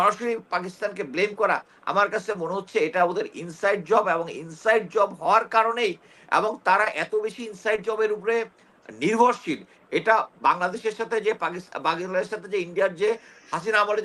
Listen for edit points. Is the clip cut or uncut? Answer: uncut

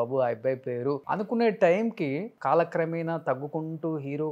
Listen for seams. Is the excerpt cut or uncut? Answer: cut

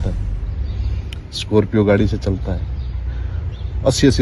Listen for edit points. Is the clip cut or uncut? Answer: uncut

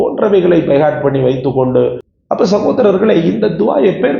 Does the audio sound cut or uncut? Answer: cut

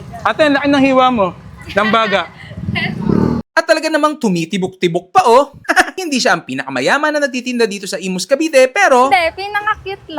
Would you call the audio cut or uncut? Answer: cut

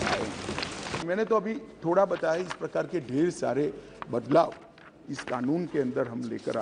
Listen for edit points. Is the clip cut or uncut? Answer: uncut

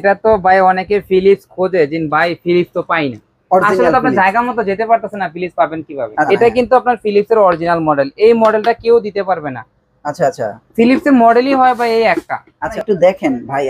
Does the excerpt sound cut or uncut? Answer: cut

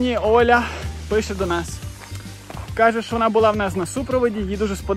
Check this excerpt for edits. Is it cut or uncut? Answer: uncut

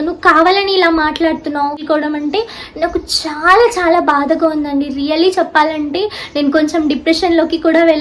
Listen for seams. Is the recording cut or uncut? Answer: cut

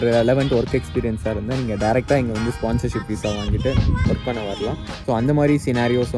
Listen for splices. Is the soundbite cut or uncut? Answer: uncut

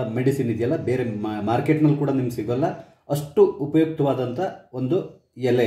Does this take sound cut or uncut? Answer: uncut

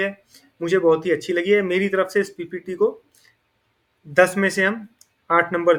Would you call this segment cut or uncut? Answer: uncut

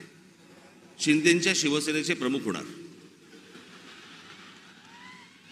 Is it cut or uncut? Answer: uncut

